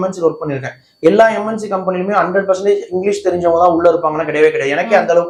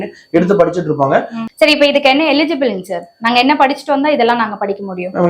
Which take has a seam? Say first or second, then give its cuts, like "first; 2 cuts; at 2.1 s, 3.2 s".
second; 1 cut; at 1.4 s